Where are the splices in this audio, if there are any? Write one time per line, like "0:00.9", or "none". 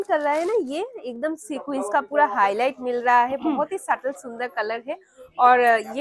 none